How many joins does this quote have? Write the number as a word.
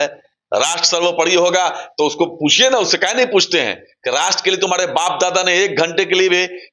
zero